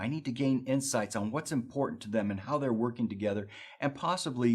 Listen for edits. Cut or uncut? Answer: cut